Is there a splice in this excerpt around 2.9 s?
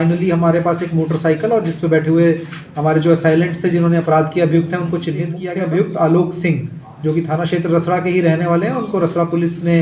no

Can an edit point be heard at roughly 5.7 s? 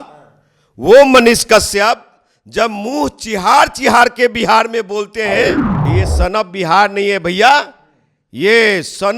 yes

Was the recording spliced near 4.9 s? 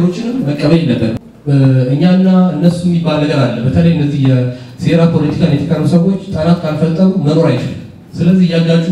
no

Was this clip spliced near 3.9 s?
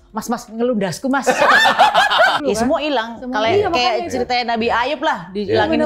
no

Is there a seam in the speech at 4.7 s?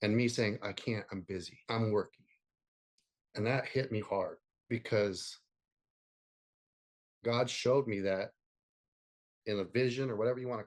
no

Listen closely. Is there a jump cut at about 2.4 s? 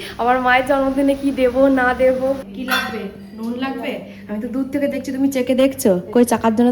yes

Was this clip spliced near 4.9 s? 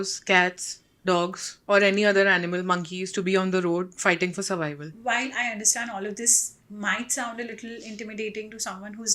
yes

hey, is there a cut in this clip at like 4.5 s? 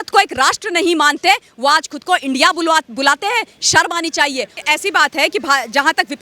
yes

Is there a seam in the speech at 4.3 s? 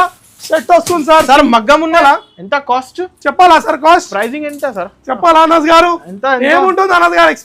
no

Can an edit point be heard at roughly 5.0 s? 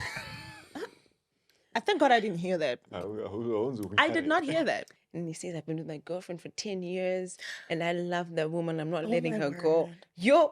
yes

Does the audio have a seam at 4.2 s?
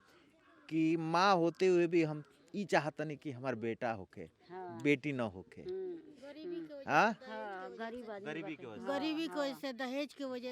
no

